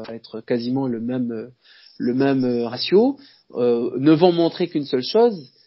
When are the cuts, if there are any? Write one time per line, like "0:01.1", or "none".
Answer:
none